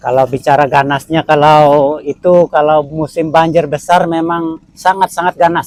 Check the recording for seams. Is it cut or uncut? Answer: uncut